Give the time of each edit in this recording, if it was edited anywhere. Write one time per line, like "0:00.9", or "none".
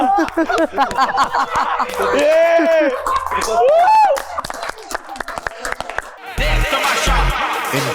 0:06.2